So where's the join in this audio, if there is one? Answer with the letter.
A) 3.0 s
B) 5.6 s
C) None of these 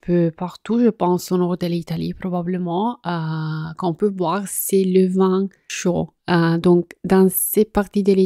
B